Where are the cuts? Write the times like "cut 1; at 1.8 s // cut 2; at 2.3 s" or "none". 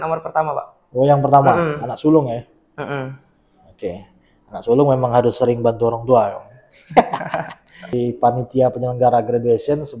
cut 1; at 7.9 s